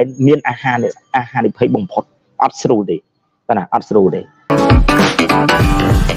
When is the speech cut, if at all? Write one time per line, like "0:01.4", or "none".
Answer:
0:04.5